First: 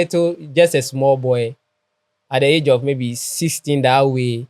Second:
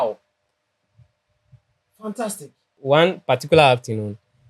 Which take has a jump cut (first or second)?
second